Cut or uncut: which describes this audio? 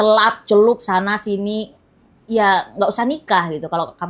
uncut